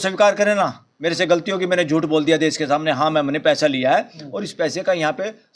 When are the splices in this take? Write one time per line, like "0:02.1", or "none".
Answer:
none